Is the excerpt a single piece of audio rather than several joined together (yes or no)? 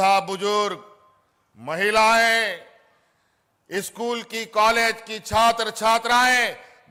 yes